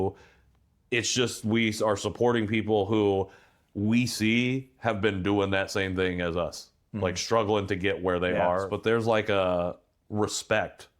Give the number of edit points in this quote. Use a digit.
2